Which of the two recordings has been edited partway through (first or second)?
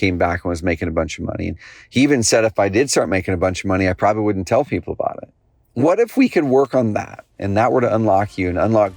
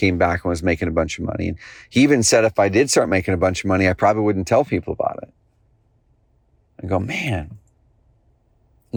first